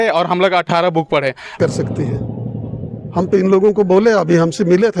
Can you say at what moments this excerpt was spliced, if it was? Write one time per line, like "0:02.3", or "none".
0:01.6

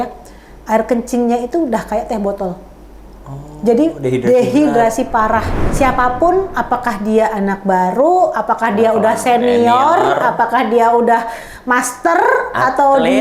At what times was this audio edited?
0:05.6

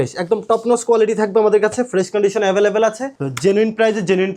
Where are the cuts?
0:03.1

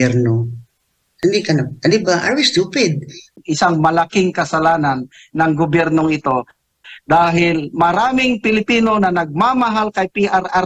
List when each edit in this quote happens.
0:03.3

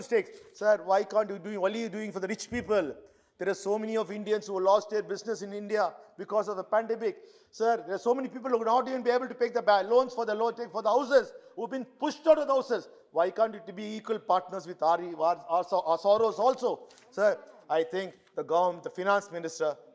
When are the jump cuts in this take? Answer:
none

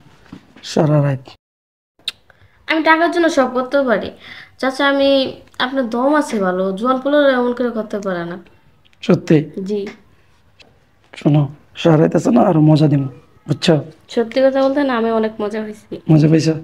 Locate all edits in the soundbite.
none

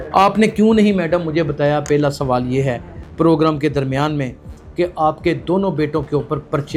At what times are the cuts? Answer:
none

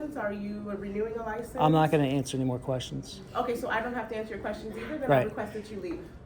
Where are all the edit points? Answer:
none

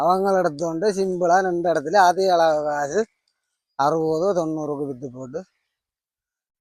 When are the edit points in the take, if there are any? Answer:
none

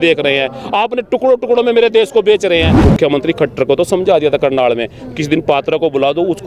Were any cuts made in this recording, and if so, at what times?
0:02.7

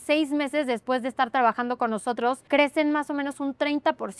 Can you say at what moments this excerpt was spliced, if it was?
0:02.4

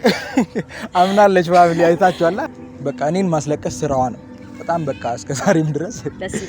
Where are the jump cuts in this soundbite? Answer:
0:02.4

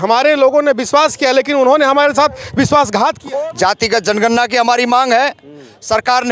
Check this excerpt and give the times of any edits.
0:03.2

